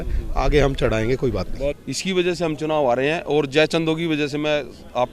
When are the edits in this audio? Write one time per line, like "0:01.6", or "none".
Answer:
0:01.8